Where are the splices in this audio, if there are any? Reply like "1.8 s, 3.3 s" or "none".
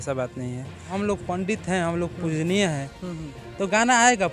0.9 s